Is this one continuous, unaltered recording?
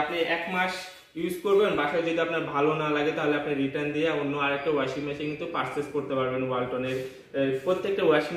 yes; 0 cuts

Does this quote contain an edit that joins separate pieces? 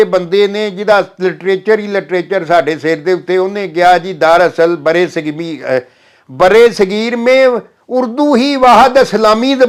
no; 0 cuts

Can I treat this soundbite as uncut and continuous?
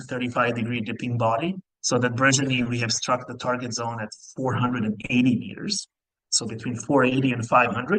no; 1 cut; at 1.7 s

